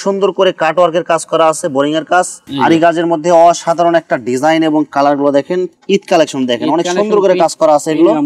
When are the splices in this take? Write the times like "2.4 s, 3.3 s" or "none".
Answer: 2.4 s, 5.7 s